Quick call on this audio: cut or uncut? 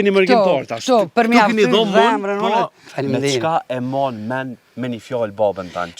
cut